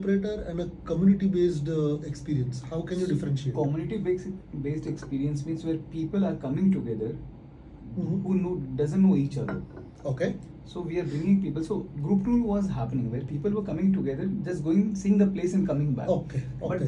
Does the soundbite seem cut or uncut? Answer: uncut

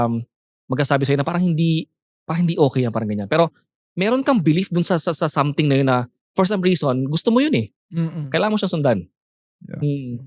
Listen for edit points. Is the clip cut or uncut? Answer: uncut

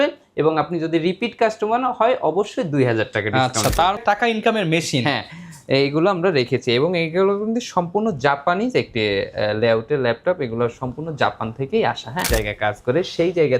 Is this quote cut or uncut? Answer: cut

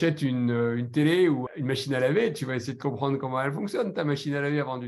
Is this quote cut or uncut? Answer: cut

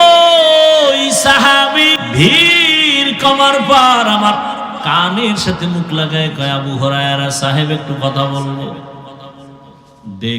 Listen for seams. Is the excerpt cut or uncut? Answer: cut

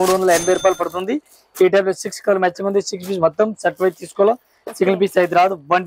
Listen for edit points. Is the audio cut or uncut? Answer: uncut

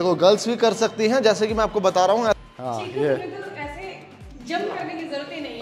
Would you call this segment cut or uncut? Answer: cut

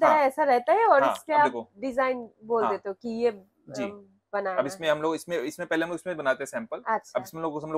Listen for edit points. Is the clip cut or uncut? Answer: uncut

